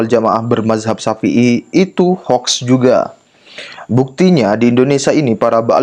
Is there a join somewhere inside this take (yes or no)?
no